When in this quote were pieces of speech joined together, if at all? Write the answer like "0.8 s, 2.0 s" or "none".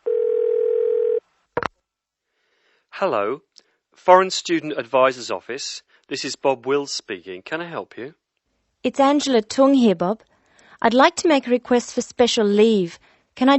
1.0 s